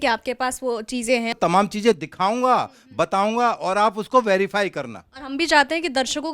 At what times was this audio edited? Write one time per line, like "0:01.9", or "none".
0:01.3